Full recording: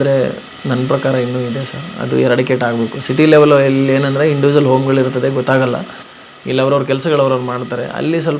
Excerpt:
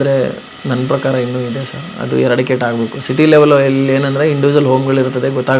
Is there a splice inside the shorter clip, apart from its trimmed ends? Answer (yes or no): no